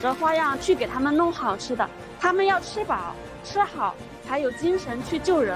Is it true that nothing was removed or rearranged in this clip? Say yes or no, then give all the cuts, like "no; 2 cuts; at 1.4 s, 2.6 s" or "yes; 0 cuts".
yes; 0 cuts